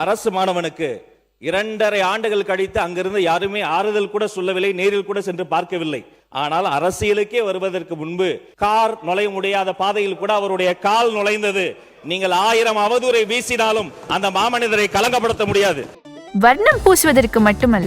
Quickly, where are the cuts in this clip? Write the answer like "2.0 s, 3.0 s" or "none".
6.1 s, 8.5 s